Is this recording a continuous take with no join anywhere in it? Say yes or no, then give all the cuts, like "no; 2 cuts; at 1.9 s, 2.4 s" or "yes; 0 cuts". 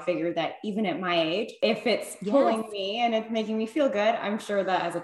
no; 1 cut; at 1.5 s